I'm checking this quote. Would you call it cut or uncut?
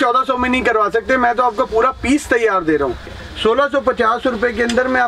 cut